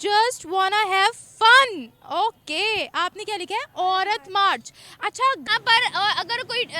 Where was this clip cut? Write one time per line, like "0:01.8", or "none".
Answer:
0:05.5